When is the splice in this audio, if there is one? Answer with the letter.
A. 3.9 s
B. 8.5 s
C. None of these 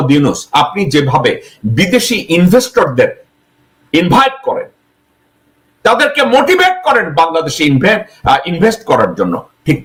C